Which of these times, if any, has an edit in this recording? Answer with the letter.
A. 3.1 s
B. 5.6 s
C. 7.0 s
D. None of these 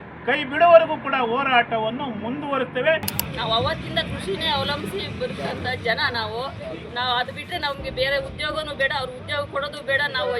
A